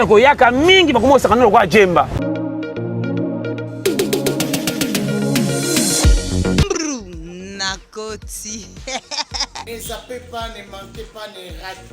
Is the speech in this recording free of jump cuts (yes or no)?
no